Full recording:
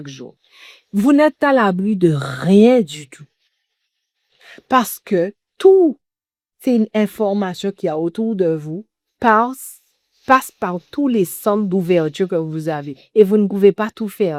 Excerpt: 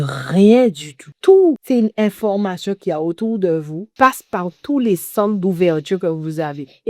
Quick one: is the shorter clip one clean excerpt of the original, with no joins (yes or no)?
no